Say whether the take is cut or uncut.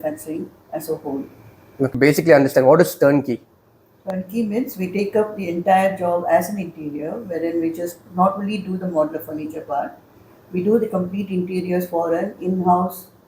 cut